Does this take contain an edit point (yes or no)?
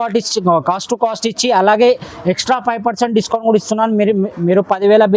no